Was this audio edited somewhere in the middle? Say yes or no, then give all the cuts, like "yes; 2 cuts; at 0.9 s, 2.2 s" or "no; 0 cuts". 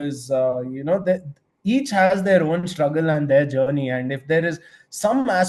no; 0 cuts